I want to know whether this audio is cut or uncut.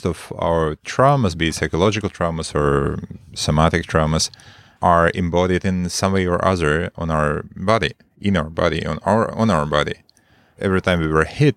uncut